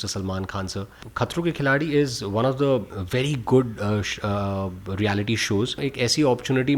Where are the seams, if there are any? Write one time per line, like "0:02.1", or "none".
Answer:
0:01.0
0:05.7